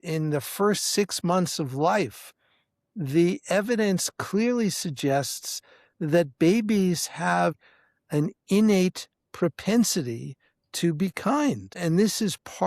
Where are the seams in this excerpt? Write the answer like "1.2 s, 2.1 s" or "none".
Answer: 7.7 s, 11.8 s